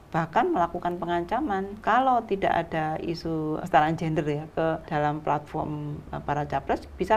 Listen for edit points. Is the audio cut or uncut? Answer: cut